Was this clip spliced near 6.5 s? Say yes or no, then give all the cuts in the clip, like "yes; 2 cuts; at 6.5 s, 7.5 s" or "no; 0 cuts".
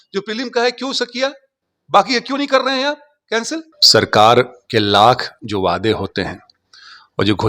no; 1 cut; at 3.7 s